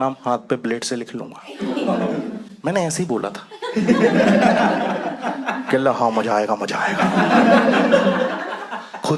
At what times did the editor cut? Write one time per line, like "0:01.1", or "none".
0:02.4

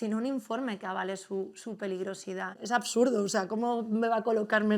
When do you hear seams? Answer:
0:02.5

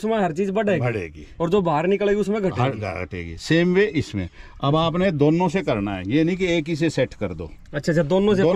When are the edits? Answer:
none

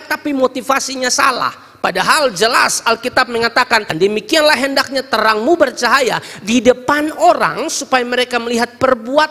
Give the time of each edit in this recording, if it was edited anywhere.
0:03.9

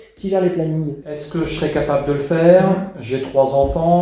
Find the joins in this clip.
0:01.4

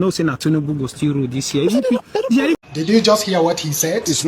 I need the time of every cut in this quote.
0:02.6

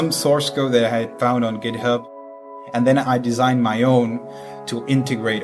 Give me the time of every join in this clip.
0:02.1

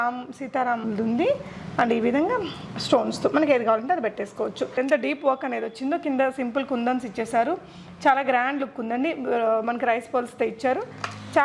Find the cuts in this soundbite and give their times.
0:04.7

